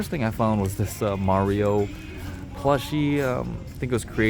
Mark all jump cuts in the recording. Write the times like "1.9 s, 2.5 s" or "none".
none

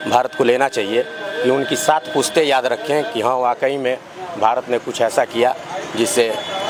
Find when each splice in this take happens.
none

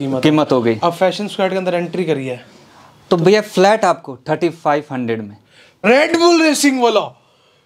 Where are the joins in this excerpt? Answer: 5.8 s

